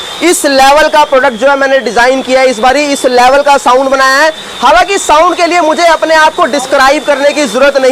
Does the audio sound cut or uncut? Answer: uncut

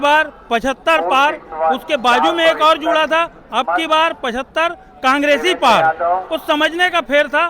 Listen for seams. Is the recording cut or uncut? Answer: uncut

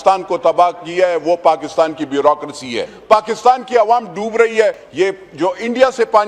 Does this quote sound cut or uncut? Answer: cut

